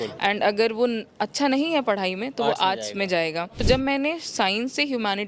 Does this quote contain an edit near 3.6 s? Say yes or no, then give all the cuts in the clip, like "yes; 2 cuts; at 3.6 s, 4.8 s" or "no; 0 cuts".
yes; 1 cut; at 3.6 s